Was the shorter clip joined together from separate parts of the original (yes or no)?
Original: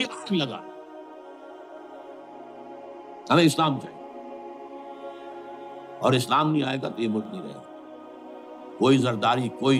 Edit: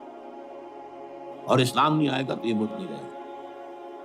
yes